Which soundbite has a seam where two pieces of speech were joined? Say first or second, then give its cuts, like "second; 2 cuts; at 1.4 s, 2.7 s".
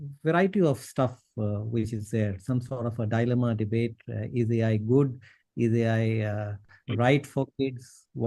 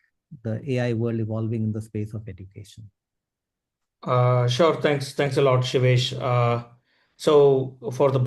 first; 1 cut; at 7.3 s